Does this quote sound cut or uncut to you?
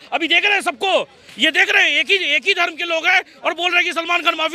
uncut